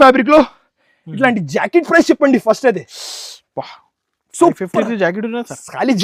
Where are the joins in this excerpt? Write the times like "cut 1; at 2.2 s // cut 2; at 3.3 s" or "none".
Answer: none